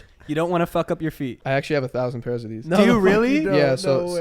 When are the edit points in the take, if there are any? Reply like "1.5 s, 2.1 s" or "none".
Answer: 1.4 s